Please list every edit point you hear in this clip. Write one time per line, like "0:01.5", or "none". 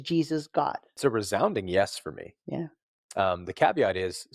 0:01.0